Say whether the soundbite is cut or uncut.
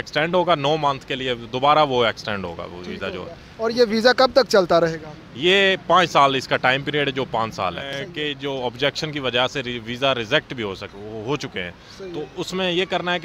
cut